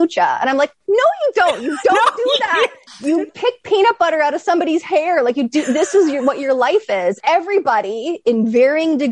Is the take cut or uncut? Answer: cut